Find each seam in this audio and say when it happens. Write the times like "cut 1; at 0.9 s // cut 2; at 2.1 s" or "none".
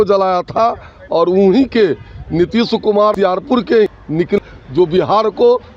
none